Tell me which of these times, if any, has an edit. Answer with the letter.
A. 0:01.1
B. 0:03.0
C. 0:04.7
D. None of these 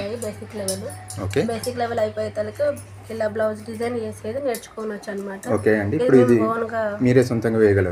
D